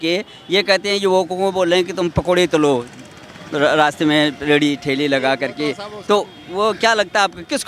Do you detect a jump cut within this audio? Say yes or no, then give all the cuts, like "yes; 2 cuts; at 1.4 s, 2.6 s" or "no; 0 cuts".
no; 0 cuts